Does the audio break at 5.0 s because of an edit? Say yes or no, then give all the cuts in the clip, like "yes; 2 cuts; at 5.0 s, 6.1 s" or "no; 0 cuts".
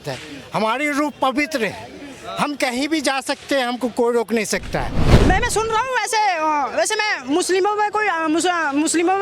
yes; 1 cut; at 5.0 s